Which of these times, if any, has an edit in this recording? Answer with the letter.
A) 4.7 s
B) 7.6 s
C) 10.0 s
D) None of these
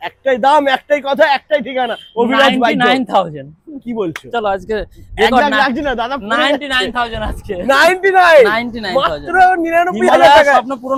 D